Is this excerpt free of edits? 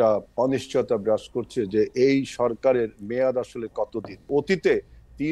no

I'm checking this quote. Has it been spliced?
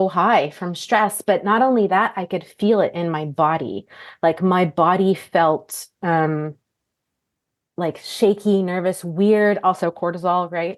no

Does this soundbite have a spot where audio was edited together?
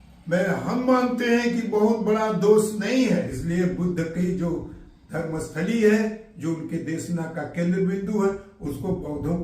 yes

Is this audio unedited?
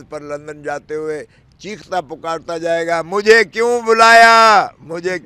yes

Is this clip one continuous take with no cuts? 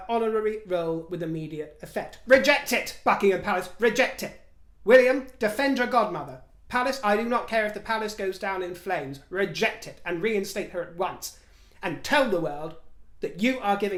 yes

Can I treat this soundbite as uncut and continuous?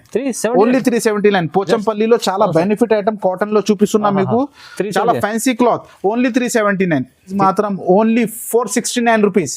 no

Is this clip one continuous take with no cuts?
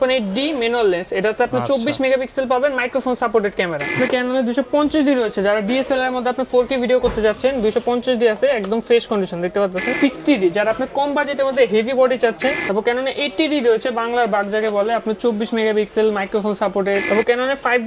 no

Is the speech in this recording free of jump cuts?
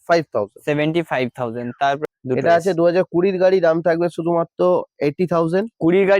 no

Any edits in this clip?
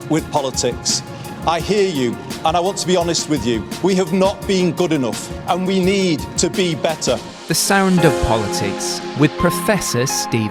no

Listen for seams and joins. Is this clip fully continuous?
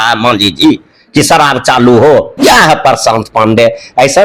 no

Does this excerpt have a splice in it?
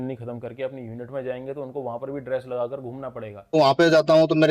yes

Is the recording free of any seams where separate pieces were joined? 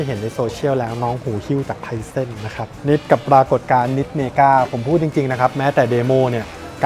no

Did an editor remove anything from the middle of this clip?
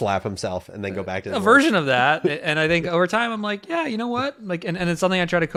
no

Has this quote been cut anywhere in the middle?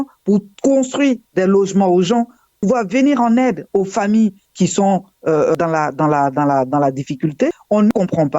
yes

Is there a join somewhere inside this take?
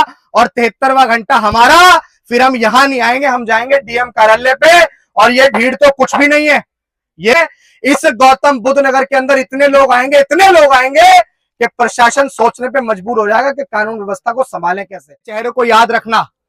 yes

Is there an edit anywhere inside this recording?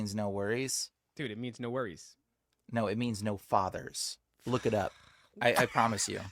no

